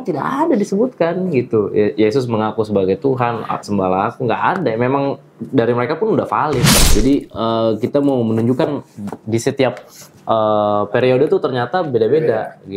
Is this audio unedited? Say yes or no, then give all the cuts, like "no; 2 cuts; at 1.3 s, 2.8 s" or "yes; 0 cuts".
no; 1 cut; at 6.8 s